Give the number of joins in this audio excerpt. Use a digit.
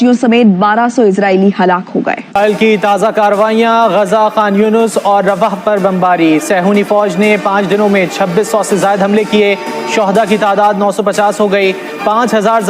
1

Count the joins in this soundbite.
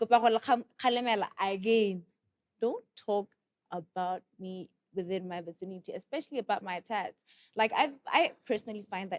0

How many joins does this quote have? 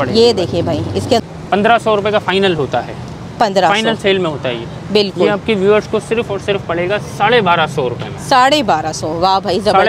1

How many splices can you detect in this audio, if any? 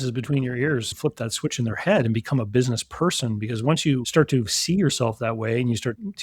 1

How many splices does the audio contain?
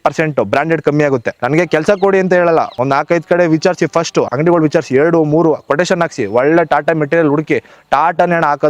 3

